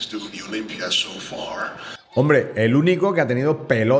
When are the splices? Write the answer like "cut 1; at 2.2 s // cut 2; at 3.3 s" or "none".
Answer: cut 1; at 2.0 s